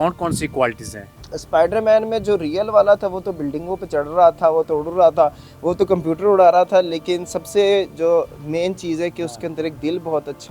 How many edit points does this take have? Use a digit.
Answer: 0